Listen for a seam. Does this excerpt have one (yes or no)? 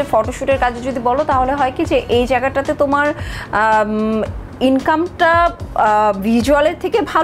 no